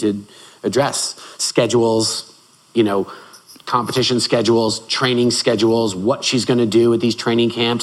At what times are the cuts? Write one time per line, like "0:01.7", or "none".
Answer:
none